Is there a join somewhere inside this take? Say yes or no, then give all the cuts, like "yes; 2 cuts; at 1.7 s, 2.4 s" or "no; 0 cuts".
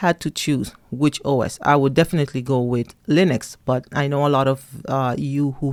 no; 0 cuts